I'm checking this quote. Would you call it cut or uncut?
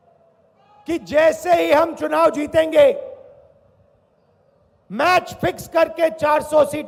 uncut